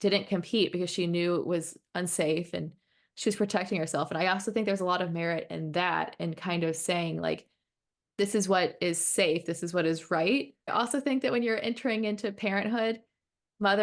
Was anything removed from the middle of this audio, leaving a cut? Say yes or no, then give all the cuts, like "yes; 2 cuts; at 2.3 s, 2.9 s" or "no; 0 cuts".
yes; 1 cut; at 10.7 s